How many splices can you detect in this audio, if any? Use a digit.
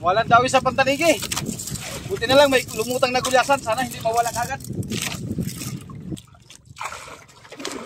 1